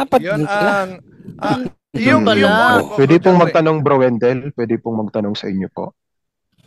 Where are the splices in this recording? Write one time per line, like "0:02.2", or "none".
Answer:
0:02.7